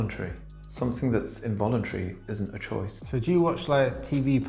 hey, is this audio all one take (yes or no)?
yes